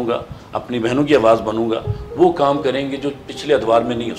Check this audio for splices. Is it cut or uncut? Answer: uncut